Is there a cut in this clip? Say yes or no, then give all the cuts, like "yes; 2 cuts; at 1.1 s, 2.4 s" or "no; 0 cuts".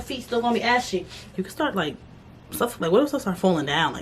yes; 1 cut; at 1.3 s